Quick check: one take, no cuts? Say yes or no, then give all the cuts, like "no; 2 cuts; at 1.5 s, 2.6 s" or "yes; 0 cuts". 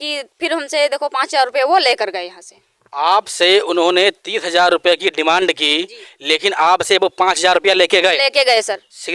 yes; 0 cuts